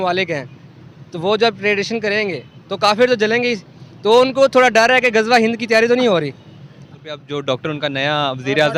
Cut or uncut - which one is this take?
cut